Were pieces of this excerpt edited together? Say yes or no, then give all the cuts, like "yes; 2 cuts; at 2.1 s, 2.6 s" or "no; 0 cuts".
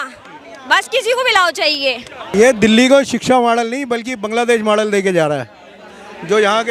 yes; 1 cut; at 2.2 s